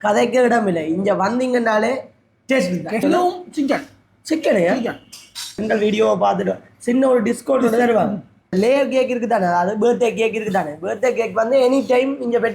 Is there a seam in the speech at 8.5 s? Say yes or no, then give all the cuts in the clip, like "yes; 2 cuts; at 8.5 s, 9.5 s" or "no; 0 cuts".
yes; 3 cuts; at 3.0 s, 5.6 s, 8.5 s